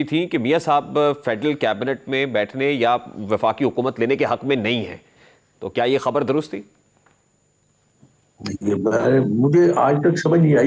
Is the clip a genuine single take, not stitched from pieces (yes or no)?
yes